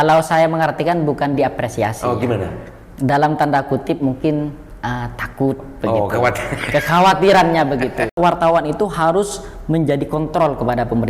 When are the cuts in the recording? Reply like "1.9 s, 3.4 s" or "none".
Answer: 8.1 s